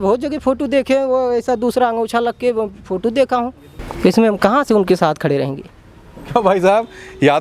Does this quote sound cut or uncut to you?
uncut